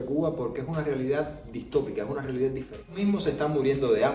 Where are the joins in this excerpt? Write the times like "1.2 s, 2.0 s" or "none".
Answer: 3.0 s